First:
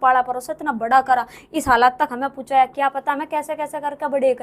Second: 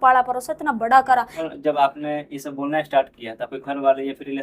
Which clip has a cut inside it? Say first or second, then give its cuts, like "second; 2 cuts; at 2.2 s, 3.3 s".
second; 1 cut; at 1.5 s